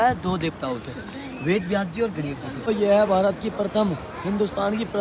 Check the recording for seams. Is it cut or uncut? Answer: cut